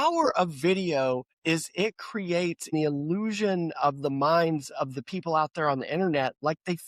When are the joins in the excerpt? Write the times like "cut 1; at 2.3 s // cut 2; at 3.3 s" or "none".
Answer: cut 1; at 1.3 s // cut 2; at 2.7 s